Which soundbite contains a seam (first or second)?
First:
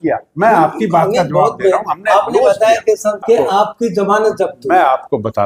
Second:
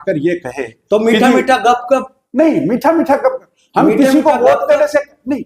first